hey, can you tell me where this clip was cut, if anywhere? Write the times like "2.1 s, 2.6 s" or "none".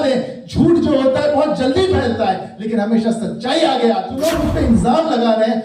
4.1 s

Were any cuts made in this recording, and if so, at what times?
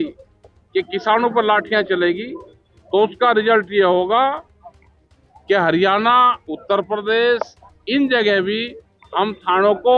none

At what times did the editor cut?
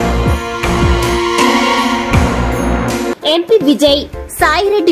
3.1 s

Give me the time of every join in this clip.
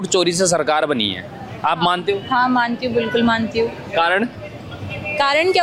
none

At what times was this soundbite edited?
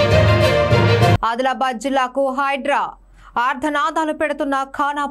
1.2 s

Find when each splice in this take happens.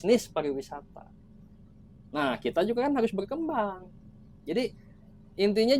none

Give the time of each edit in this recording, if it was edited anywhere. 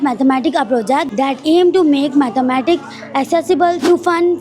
1.1 s

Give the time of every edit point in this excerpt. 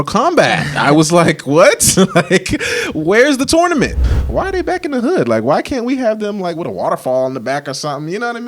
4.0 s

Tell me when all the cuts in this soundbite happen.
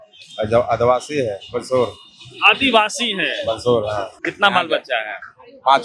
4.2 s

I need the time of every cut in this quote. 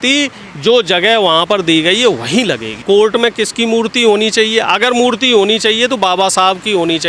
2.7 s

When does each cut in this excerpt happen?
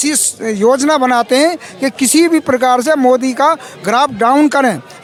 none

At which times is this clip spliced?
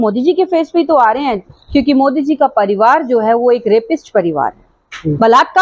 1.5 s, 4.8 s

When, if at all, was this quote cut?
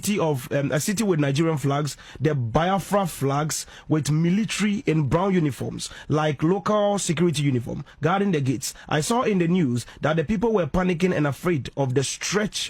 none

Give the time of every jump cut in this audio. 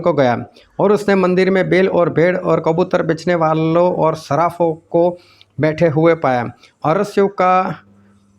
6.6 s

